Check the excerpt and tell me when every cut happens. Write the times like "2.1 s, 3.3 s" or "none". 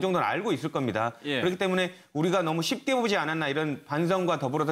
none